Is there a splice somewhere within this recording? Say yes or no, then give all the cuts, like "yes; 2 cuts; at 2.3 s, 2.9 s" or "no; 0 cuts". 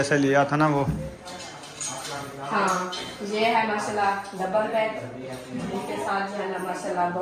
no; 0 cuts